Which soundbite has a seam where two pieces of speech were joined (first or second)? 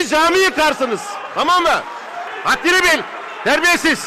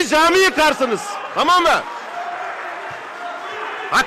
first